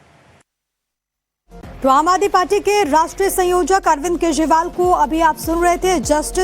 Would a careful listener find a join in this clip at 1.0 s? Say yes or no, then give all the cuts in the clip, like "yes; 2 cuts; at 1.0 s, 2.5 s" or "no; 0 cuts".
no; 1 cut; at 4.7 s